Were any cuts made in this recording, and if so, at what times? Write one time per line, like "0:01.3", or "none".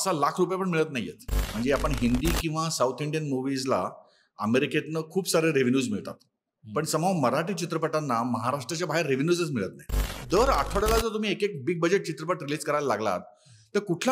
0:01.4
0:10.2